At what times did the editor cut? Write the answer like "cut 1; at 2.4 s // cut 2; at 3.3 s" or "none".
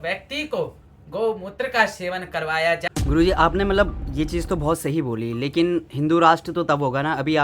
cut 1; at 2.8 s

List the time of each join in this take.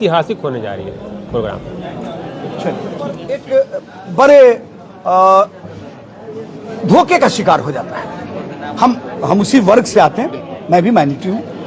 cut 1; at 3.4 s

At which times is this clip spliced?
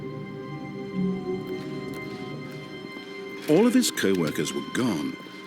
cut 1; at 3.5 s

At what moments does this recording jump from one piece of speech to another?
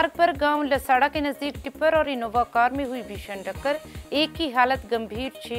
none

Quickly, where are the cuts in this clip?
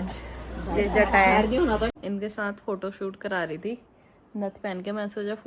cut 1; at 1.9 s

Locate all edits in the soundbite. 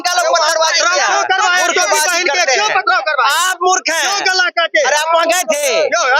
none

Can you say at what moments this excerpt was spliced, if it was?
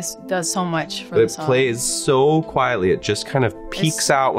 none

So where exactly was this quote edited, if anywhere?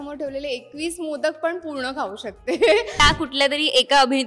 cut 1; at 3.0 s

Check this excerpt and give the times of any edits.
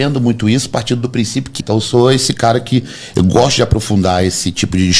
cut 1; at 1.5 s

